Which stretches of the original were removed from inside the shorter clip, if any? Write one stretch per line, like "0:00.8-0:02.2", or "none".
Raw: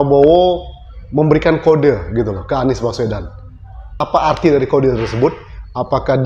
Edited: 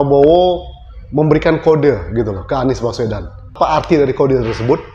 0:03.5-0:04.1